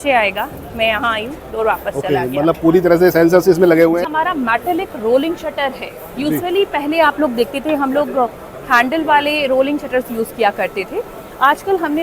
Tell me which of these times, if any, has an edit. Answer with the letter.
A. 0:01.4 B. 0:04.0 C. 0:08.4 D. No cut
B